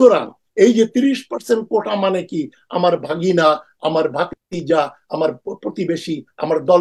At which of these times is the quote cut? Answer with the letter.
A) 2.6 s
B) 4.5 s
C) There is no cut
B